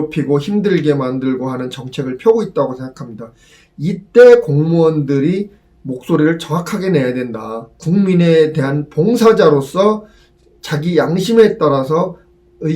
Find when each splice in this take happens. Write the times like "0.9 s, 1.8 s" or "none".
none